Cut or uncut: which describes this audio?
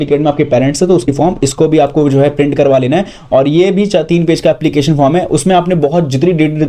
cut